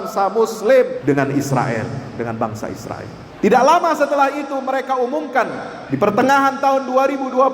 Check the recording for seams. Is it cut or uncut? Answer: cut